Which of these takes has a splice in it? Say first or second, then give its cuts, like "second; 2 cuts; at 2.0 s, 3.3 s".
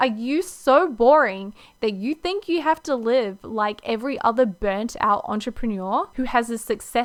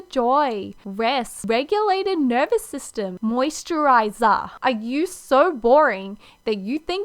second; 2 cuts; at 1.0 s, 3.1 s